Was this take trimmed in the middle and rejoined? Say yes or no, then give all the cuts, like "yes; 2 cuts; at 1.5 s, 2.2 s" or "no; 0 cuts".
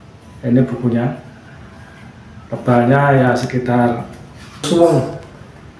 yes; 1 cut; at 4.6 s